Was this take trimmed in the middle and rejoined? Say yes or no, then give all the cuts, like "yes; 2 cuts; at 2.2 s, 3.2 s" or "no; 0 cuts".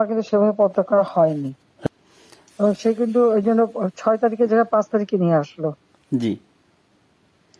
yes; 1 cut; at 1.7 s